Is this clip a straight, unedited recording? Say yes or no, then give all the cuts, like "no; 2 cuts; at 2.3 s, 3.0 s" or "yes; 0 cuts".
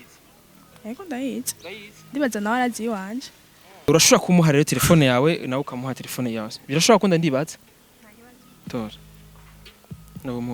no; 1 cut; at 3.9 s